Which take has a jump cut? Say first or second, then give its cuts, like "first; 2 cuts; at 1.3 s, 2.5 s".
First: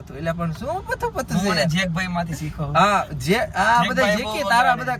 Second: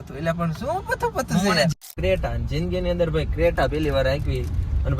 second; 1 cut; at 1.9 s